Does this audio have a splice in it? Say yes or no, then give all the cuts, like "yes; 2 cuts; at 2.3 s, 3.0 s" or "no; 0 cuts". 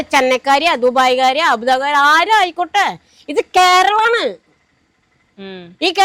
no; 0 cuts